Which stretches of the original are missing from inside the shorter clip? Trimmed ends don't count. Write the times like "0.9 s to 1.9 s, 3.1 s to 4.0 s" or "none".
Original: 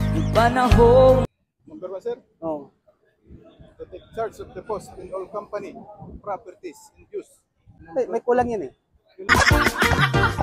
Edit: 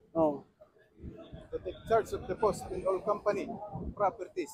none